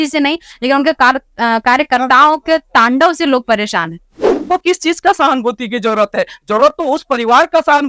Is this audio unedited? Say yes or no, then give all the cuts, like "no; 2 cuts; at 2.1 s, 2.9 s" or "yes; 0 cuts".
no; 1 cut; at 4.4 s